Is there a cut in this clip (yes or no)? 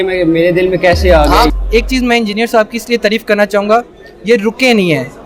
yes